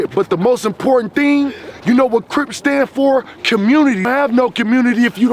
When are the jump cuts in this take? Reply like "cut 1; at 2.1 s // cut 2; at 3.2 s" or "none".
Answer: cut 1; at 4.1 s

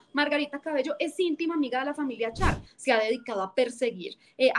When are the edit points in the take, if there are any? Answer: cut 1; at 2.7 s

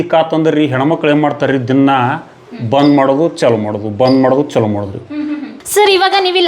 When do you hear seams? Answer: cut 1; at 5.5 s

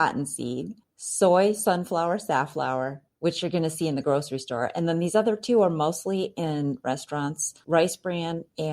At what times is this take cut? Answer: cut 1; at 7.5 s

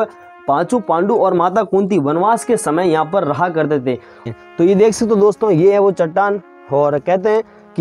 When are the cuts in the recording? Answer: cut 1; at 4.3 s

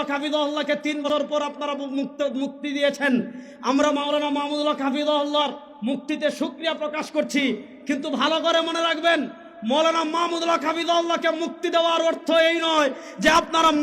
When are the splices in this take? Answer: cut 1; at 1.0 s

